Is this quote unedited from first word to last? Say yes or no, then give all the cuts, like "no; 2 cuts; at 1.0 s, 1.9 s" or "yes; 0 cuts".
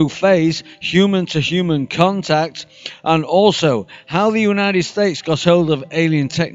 no; 1 cut; at 3.9 s